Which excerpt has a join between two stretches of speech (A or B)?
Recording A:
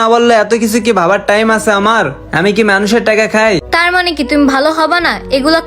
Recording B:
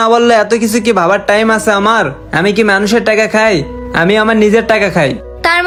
A